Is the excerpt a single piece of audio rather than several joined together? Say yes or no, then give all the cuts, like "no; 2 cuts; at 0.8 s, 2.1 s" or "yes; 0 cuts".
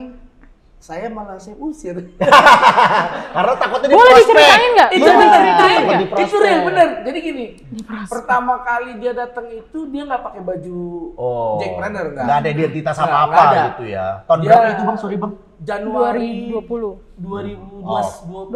yes; 0 cuts